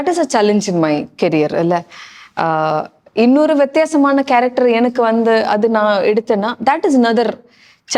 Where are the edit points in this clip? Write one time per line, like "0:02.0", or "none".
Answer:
none